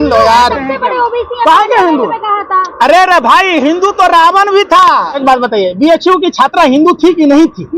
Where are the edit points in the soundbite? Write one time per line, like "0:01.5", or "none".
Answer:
0:05.2